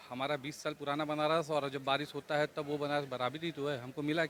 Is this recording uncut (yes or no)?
yes